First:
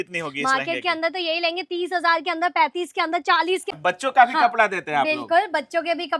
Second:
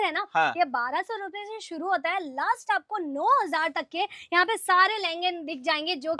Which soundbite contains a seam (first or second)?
first